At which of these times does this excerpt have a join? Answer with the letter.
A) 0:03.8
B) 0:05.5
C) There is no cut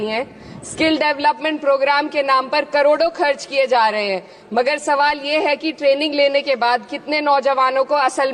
C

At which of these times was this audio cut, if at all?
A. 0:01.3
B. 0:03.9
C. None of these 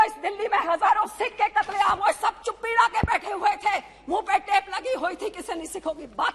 C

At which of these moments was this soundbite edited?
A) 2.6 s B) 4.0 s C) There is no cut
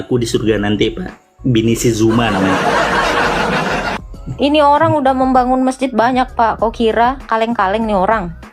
B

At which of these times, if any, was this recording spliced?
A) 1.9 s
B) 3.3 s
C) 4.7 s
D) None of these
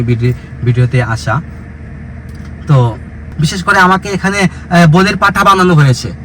B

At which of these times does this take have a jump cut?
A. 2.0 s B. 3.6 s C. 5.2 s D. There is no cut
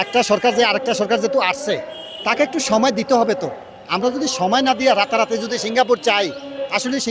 D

